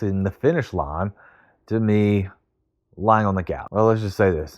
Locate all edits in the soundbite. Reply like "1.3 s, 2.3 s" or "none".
3.6 s